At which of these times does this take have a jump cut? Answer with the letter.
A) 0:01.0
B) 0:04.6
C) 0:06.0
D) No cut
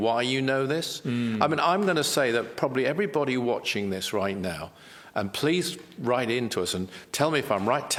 D